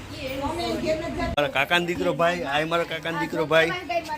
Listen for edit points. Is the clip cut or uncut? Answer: cut